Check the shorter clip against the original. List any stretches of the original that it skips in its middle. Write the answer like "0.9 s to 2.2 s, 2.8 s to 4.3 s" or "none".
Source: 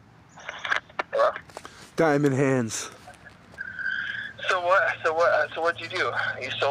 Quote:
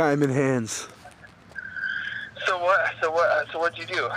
none